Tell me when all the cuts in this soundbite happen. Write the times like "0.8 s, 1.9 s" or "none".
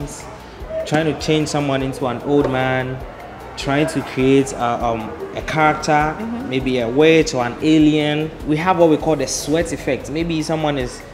8.3 s